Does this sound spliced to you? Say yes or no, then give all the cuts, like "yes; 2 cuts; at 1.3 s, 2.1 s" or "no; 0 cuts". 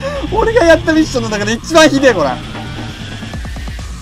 yes; 1 cut; at 2.4 s